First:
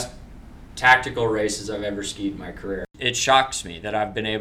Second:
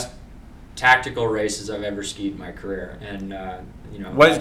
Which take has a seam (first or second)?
first